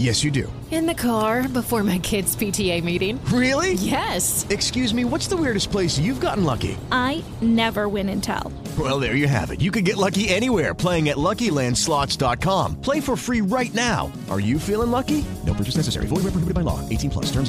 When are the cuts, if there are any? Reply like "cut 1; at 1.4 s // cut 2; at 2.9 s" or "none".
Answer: none